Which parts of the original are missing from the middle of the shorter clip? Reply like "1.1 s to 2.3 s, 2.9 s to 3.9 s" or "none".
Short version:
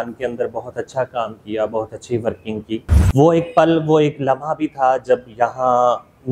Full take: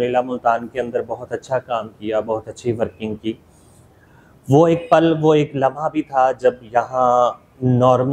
3.5 s to 4.3 s